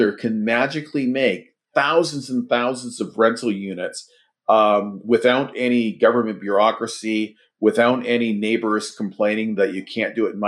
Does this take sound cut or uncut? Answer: uncut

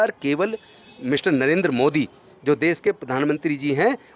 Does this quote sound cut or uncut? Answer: uncut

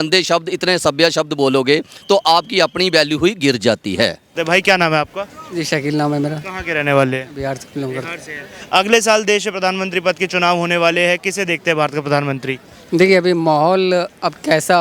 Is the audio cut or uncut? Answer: cut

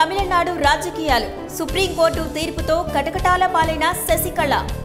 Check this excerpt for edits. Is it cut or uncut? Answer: uncut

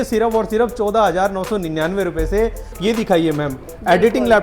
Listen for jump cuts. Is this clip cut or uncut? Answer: cut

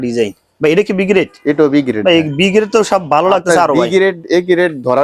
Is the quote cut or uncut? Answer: uncut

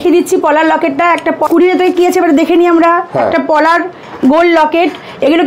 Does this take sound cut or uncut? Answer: cut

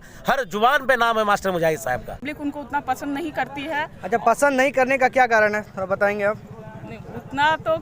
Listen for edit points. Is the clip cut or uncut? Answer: cut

